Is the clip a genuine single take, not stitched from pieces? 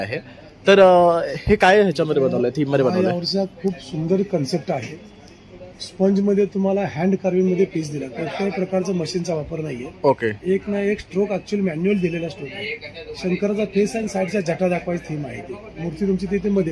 yes; 0 cuts

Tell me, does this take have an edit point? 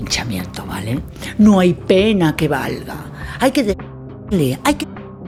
no; 0 cuts

